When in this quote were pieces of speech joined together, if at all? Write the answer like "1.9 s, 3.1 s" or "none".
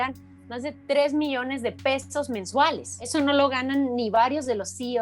3.1 s